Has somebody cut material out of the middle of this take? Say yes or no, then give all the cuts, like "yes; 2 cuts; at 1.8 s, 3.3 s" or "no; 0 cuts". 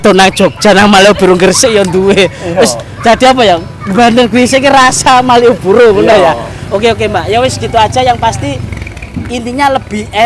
no; 0 cuts